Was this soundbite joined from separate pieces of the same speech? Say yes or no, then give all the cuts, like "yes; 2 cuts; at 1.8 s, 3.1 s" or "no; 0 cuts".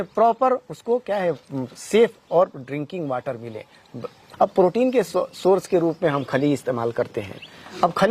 yes; 1 cut; at 4.3 s